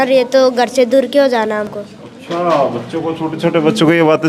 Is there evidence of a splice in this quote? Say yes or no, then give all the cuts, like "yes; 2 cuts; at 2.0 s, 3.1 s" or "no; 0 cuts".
no; 0 cuts